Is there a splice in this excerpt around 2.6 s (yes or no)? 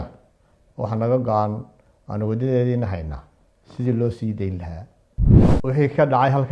no